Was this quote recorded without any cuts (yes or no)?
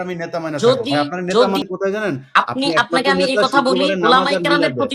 no